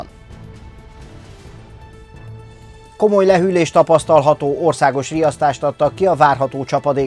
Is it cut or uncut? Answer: uncut